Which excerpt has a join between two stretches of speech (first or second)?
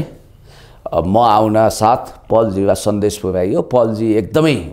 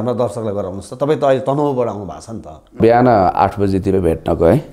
second